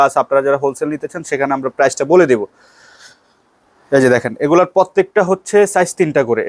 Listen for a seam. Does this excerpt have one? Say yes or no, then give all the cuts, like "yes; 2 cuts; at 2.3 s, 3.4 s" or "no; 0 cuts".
no; 0 cuts